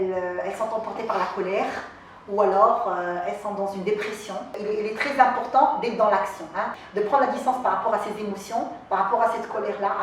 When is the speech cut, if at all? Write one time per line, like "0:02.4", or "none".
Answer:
0:04.6
0:06.8